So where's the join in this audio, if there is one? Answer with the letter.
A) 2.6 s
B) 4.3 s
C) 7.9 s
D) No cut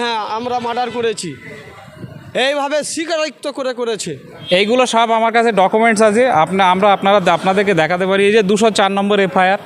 B